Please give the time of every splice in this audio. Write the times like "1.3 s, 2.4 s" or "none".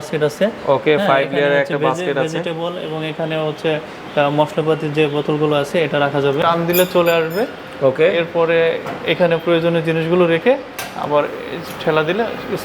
6.4 s